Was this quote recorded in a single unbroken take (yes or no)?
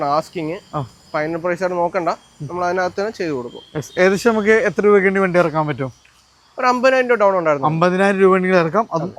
yes